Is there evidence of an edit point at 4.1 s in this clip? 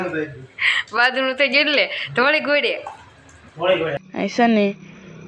yes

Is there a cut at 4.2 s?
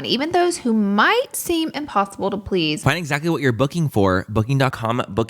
no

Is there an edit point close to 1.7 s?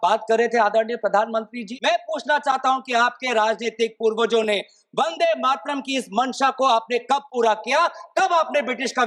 yes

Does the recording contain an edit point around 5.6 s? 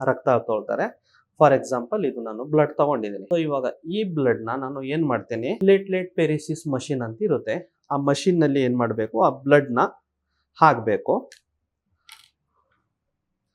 yes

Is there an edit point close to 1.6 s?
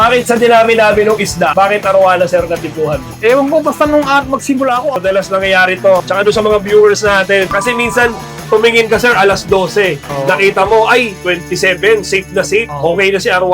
no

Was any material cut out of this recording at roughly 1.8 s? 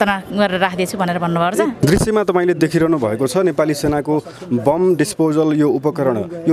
yes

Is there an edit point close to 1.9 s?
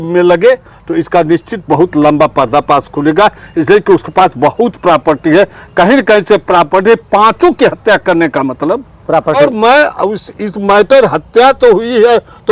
no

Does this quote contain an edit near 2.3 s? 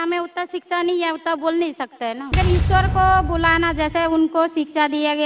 yes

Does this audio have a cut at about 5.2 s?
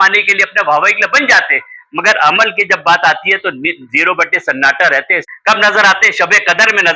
yes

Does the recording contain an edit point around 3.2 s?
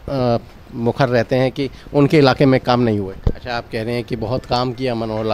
yes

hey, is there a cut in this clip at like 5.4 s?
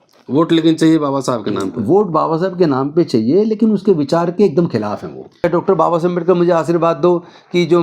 yes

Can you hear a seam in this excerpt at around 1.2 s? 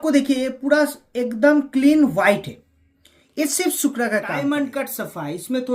no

